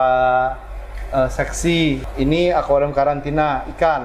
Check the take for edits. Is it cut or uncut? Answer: cut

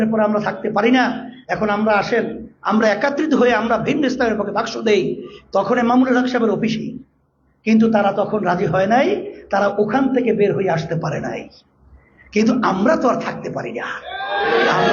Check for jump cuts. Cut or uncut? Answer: uncut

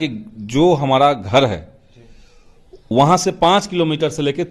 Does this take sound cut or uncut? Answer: uncut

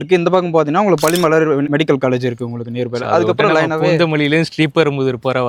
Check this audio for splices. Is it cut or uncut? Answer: uncut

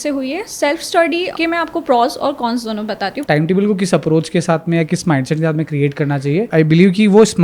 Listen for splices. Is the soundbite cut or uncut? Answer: cut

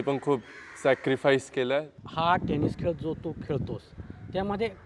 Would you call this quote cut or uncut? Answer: cut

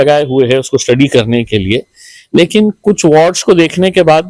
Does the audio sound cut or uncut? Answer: uncut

